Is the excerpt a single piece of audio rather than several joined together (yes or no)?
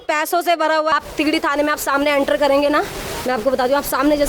no